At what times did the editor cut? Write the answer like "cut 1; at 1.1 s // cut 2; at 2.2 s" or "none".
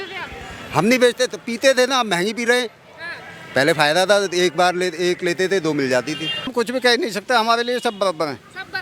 cut 1; at 6.5 s